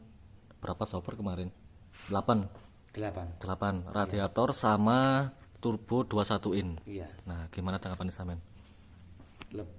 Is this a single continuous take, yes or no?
yes